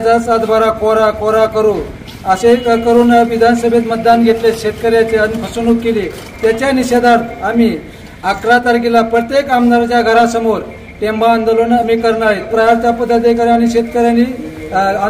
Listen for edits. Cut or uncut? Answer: cut